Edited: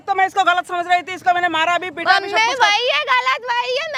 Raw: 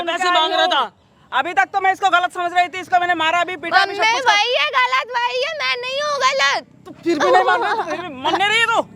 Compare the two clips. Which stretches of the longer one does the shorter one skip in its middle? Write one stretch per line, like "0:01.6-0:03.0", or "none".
none